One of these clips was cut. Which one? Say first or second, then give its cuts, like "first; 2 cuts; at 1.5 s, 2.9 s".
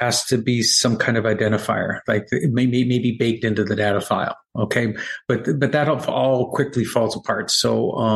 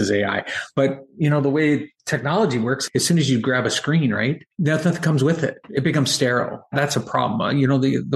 second; 4 cuts; at 2.8 s, 4.5 s, 5.7 s, 6.7 s